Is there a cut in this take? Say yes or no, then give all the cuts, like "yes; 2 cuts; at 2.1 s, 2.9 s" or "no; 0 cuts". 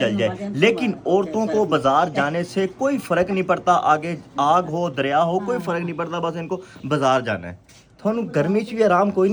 no; 0 cuts